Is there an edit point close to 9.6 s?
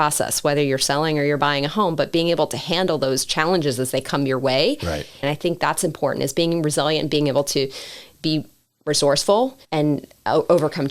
yes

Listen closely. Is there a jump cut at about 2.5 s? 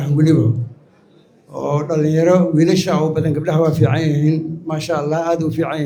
no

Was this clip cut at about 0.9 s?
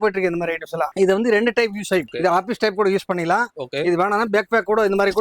yes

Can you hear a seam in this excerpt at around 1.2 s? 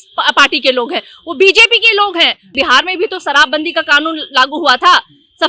no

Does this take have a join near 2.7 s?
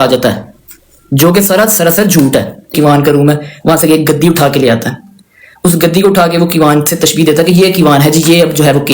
yes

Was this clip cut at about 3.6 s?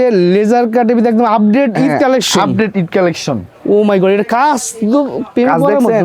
no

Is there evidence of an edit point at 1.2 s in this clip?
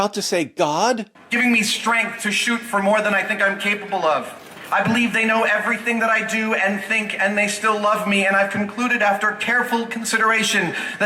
yes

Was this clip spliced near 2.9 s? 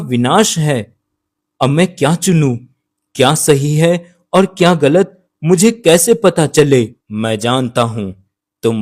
no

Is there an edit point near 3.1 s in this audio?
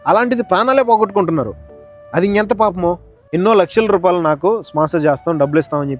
yes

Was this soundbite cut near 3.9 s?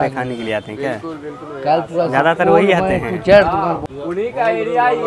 yes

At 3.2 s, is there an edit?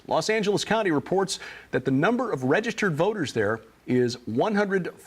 yes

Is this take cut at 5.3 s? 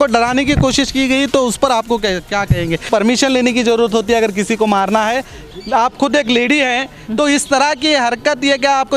yes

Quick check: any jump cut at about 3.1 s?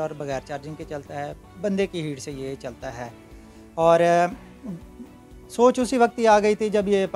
no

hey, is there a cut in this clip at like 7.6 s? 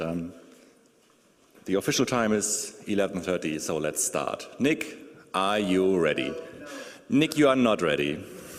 no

